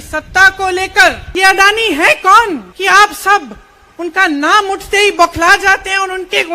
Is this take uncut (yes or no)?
no